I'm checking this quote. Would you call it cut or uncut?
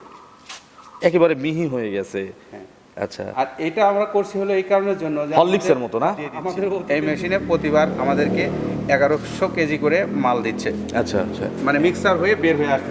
cut